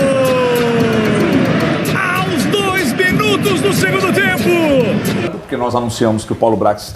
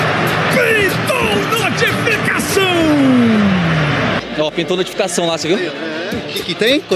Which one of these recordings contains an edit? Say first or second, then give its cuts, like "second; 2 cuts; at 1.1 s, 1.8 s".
first; 1 cut; at 5.4 s